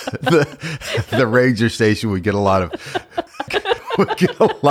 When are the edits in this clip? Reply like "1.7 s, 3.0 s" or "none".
3.4 s

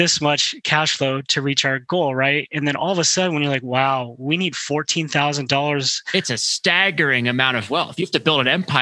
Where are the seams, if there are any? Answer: 6.6 s

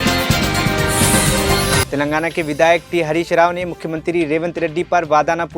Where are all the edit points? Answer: 1.8 s

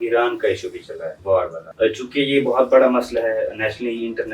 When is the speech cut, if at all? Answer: 1.6 s

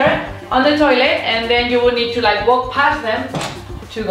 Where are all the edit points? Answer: none

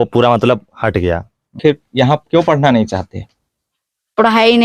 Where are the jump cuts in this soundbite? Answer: 1.6 s

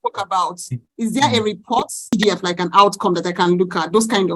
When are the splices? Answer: 2.1 s

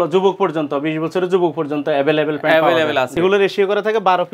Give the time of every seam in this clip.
3.1 s

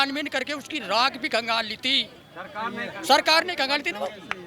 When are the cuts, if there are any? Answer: none

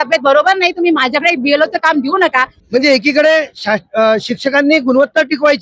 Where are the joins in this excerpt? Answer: 2.6 s

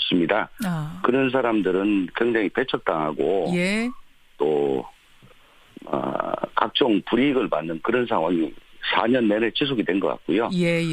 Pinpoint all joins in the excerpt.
4.8 s

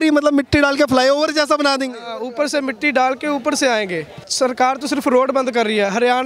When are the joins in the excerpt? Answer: 4.3 s

